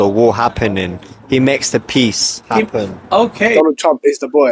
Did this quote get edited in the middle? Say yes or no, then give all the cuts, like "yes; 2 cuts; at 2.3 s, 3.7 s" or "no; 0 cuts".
yes; 1 cut; at 3.5 s